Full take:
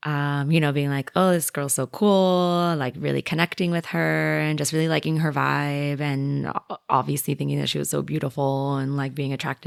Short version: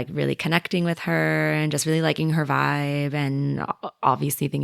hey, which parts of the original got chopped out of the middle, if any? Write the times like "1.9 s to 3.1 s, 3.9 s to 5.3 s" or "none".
none